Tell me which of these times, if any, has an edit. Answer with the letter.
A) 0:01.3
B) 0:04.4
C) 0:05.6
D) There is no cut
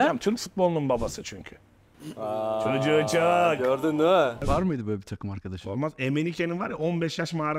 B